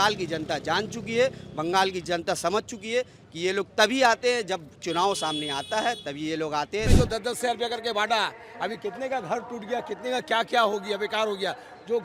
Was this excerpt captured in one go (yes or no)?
no